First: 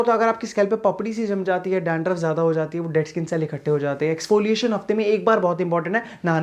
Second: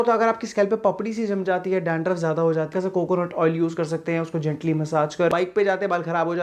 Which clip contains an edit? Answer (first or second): second